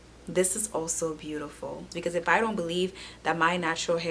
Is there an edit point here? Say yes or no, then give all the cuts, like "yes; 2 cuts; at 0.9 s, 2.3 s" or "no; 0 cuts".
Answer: yes; 1 cut; at 1.9 s